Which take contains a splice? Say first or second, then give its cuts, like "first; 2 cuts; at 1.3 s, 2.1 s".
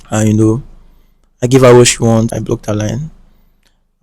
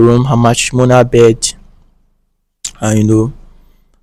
first; 1 cut; at 2.3 s